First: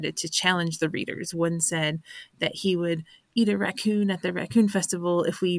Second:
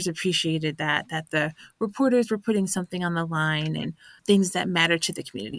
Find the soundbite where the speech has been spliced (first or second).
second